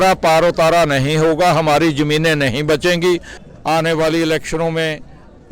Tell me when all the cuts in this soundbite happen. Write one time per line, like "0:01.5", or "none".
0:03.3